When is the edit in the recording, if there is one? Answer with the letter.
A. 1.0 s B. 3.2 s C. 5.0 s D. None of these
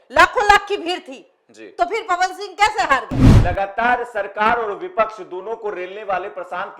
B